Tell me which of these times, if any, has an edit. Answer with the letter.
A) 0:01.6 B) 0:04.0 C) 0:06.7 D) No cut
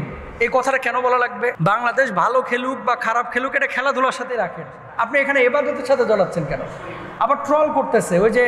A